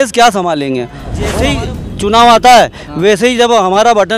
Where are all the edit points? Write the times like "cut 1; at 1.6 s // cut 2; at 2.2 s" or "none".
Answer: cut 1; at 1.4 s